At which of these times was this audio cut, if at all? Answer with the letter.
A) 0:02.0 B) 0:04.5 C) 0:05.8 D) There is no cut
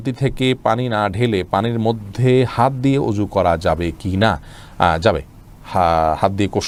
D